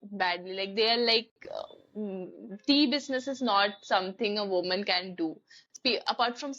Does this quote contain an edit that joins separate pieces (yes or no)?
yes